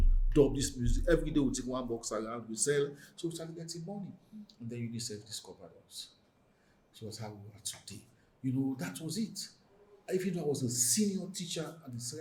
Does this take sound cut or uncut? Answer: uncut